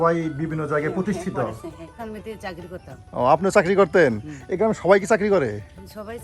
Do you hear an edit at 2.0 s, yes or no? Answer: yes